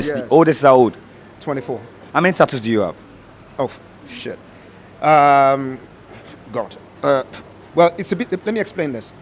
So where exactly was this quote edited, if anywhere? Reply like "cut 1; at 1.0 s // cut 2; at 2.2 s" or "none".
cut 1; at 1.9 s